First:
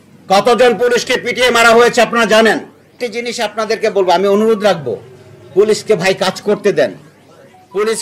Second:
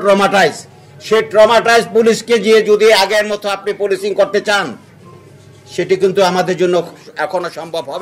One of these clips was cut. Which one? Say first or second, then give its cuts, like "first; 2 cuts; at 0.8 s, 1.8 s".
first; 1 cut; at 2.8 s